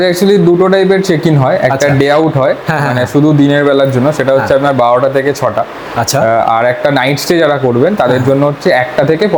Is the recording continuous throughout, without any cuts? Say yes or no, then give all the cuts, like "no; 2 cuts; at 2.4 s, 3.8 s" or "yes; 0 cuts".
yes; 0 cuts